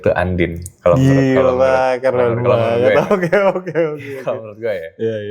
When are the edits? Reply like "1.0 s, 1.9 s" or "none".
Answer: none